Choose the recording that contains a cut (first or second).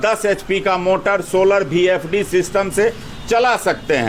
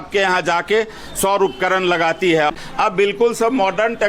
second